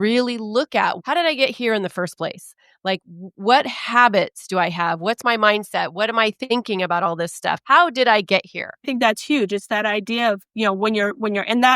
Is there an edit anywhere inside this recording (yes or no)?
yes